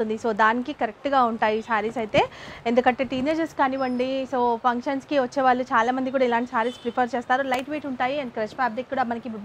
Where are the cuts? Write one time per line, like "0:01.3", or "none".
none